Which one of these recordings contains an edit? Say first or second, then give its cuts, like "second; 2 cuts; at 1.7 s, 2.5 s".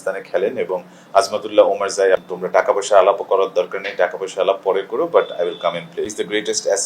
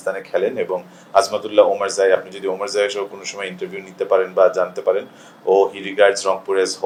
first; 2 cuts; at 2.3 s, 6.1 s